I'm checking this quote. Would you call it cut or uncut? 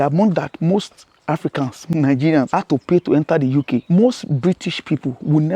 cut